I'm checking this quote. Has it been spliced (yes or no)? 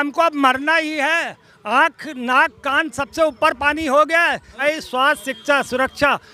no